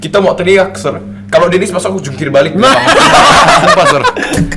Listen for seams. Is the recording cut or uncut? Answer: uncut